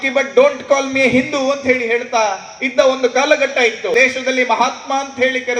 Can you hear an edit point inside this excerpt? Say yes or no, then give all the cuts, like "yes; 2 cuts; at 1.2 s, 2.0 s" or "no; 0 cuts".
yes; 1 cut; at 3.9 s